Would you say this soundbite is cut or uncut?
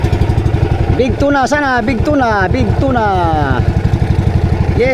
uncut